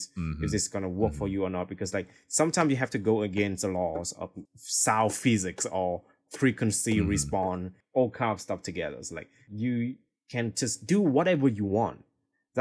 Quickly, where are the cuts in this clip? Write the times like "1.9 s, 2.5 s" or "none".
7.8 s